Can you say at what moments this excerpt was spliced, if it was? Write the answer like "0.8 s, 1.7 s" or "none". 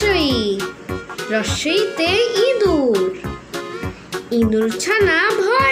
none